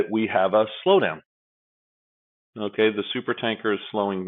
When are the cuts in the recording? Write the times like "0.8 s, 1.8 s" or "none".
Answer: none